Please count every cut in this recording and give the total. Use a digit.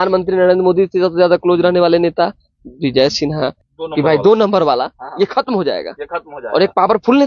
1